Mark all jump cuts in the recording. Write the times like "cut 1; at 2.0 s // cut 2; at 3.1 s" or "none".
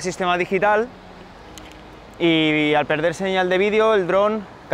none

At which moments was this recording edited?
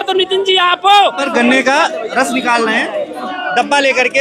cut 1; at 1.2 s // cut 2; at 3.3 s

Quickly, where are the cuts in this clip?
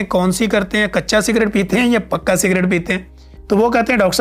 none

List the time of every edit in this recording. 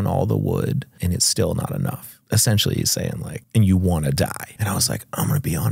cut 1; at 0.9 s // cut 2; at 2.1 s // cut 3; at 3.3 s // cut 4; at 4.5 s

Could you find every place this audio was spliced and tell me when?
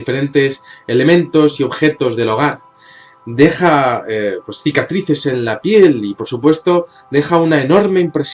cut 1; at 4.0 s

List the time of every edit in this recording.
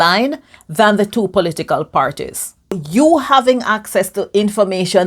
cut 1; at 2.8 s

